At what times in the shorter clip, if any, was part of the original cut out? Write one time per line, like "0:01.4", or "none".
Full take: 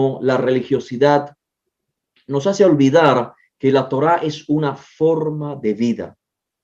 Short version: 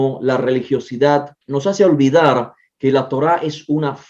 0:01.4